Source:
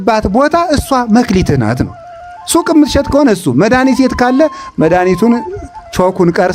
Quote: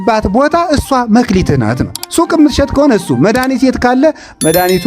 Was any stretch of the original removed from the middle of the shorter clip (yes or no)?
yes